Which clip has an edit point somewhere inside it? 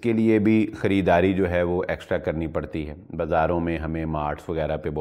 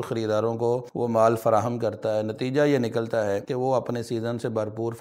second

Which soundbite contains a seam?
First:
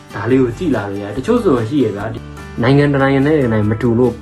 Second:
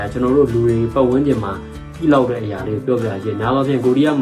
first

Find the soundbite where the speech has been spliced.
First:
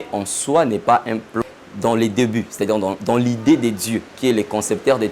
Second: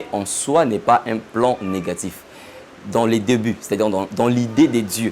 first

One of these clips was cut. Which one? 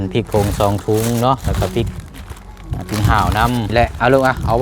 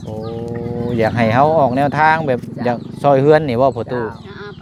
first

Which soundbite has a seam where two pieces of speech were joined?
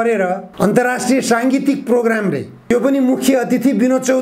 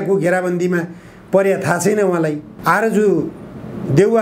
second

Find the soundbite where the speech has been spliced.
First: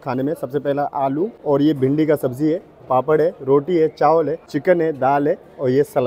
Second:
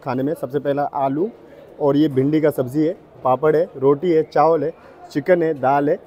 first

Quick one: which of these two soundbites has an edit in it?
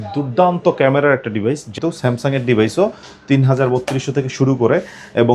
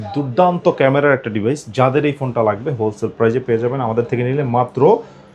first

